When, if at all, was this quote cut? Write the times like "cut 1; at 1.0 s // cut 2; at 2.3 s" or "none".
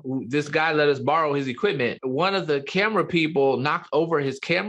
cut 1; at 1.9 s

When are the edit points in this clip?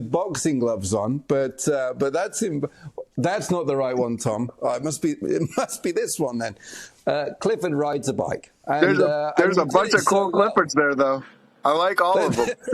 none

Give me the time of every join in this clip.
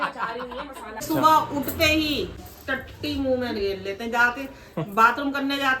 cut 1; at 1.0 s // cut 2; at 2.4 s

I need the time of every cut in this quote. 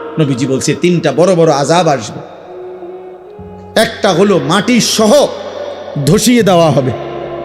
cut 1; at 2.2 s // cut 2; at 3.5 s

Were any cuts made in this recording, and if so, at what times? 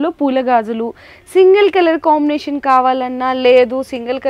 none

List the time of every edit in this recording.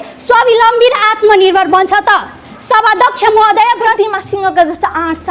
cut 1; at 3.9 s

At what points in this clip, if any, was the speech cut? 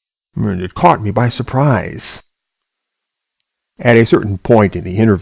cut 1; at 2.0 s

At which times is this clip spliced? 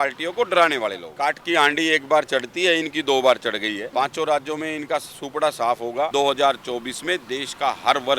cut 1; at 1.1 s // cut 2; at 3.8 s // cut 3; at 6.1 s

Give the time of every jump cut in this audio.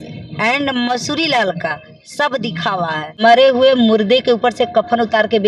cut 1; at 3.2 s

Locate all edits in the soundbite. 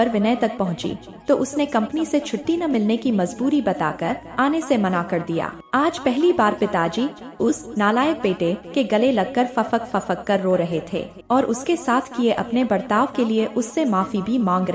cut 1; at 5.6 s // cut 2; at 11.1 s

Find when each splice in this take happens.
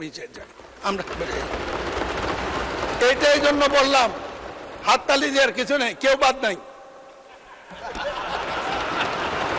none

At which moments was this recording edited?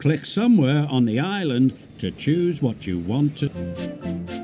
cut 1; at 3.5 s

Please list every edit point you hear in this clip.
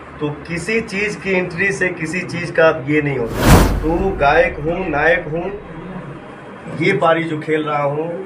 cut 1; at 3.4 s

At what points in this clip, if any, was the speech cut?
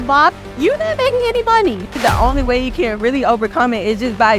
cut 1; at 2.0 s

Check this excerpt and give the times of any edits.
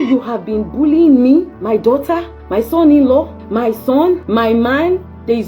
cut 1; at 1.5 s // cut 2; at 2.4 s // cut 3; at 3.4 s // cut 4; at 4.2 s

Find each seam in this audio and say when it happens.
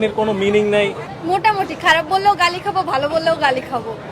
cut 1; at 1.0 s

